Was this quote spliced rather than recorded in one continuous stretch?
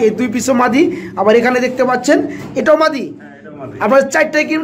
no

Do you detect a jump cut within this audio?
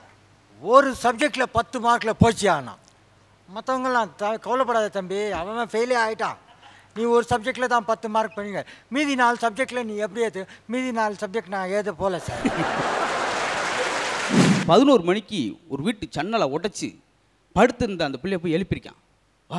yes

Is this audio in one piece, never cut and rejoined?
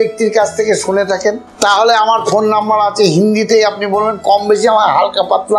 no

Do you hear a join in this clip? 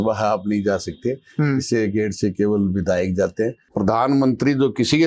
yes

